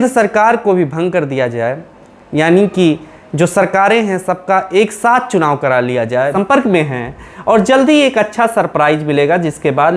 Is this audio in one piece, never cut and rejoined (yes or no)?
no